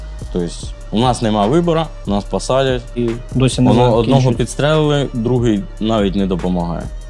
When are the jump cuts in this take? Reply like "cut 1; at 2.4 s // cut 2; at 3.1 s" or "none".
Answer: cut 1; at 3.0 s